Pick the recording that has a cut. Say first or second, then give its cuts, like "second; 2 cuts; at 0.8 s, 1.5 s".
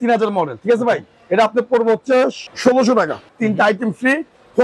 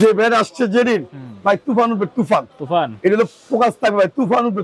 first; 2 cuts; at 2.5 s, 3.2 s